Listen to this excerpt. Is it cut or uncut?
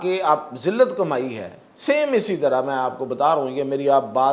uncut